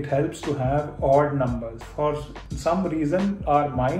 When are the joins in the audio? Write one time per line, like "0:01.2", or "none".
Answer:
none